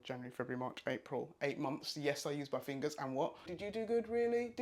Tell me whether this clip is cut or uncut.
cut